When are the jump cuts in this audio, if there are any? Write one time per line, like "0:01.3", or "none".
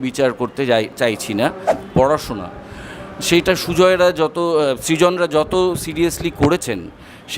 0:01.8